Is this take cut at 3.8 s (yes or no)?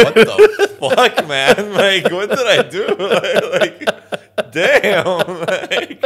no